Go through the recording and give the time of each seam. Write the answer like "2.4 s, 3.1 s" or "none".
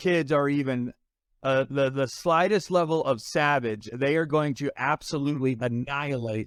none